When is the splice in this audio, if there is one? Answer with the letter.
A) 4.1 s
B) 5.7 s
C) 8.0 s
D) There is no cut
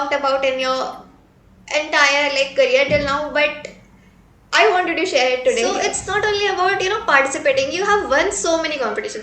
B